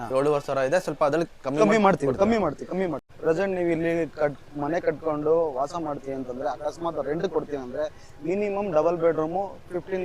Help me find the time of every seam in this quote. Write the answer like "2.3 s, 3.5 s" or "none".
3.1 s